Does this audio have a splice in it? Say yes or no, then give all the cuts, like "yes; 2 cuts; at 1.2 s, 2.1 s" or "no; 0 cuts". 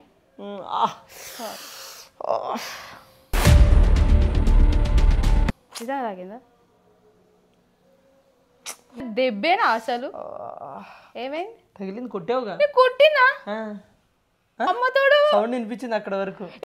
no; 0 cuts